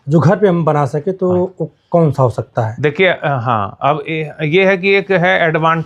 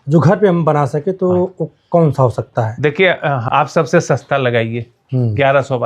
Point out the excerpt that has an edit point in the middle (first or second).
second